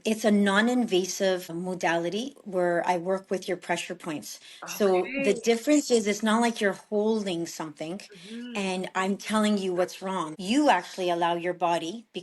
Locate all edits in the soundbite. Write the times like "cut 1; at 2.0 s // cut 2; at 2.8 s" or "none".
cut 1; at 1.5 s // cut 2; at 10.2 s